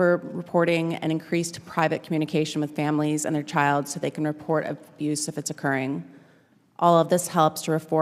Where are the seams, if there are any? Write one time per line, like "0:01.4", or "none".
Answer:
none